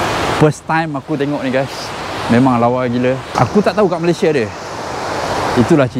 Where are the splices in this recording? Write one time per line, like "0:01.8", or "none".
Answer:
0:03.3